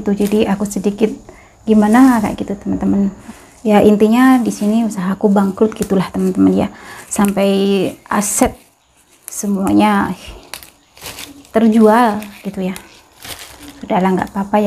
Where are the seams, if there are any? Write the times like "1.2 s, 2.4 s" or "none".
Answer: 3.2 s